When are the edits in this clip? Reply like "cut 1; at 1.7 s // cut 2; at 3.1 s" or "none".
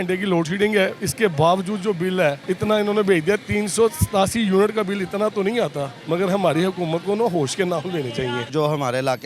cut 1; at 2.4 s // cut 2; at 5.9 s // cut 3; at 8.5 s